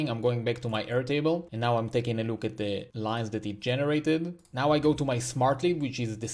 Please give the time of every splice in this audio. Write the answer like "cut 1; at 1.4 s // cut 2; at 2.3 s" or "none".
cut 1; at 1.5 s // cut 2; at 2.9 s // cut 3; at 4.4 s